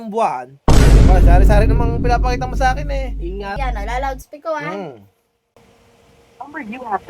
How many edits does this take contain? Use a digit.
1